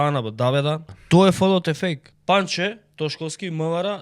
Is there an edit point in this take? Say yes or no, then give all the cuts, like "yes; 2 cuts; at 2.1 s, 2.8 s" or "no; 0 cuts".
yes; 2 cuts; at 0.9 s, 2.1 s